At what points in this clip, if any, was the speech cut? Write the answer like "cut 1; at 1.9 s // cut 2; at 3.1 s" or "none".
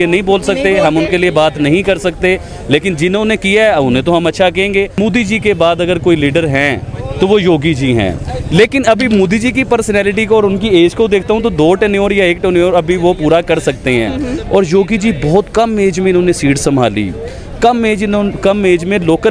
cut 1; at 5.0 s